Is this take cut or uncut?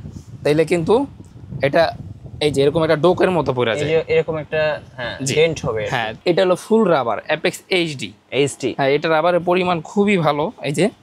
cut